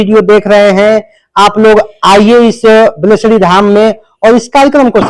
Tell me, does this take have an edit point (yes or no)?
no